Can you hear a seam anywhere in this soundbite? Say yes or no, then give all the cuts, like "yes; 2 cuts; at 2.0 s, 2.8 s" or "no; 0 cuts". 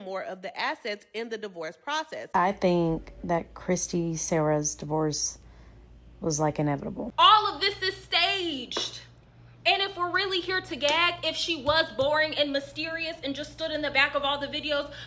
yes; 2 cuts; at 2.2 s, 7.0 s